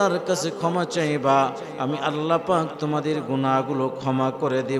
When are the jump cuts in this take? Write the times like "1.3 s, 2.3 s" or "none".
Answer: none